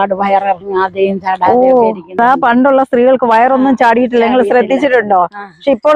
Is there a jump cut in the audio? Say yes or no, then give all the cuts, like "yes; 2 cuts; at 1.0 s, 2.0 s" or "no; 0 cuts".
yes; 1 cut; at 2.2 s